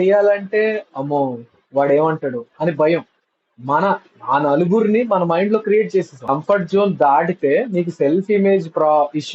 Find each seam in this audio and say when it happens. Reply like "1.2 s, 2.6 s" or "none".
6.3 s